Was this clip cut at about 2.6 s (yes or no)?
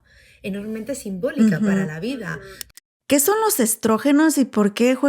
yes